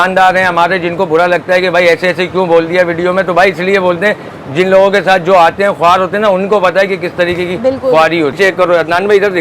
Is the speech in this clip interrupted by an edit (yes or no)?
yes